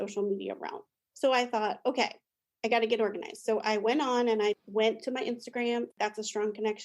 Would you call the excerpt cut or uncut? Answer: cut